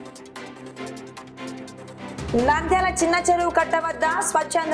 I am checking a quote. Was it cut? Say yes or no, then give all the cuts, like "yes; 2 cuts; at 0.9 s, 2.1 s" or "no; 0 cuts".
no; 0 cuts